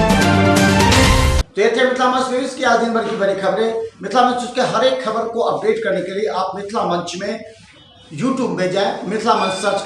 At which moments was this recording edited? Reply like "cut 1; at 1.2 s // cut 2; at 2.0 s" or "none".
none